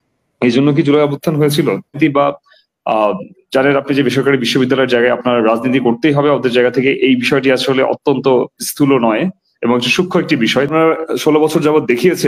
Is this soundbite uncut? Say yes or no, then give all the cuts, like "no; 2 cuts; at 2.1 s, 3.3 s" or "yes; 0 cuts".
no; 2 cuts; at 2.0 s, 10.7 s